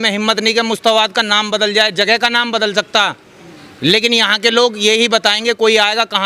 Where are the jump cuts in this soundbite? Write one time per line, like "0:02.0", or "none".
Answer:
none